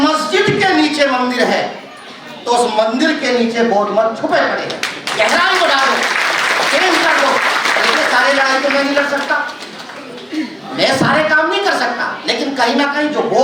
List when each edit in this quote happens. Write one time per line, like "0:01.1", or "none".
none